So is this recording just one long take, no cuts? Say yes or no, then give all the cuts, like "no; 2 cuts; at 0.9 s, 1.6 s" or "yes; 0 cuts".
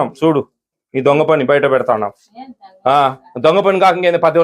yes; 0 cuts